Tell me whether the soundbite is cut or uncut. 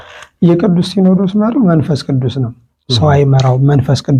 uncut